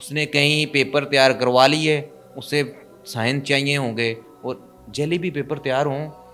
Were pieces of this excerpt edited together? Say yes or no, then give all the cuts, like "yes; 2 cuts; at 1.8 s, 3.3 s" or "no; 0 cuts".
no; 0 cuts